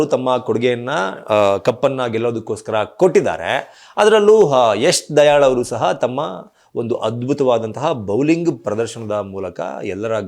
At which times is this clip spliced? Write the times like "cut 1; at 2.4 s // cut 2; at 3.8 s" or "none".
none